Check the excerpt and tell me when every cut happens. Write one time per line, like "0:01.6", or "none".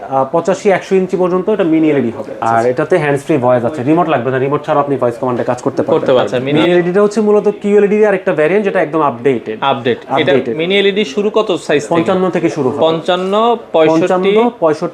0:02.4
0:06.4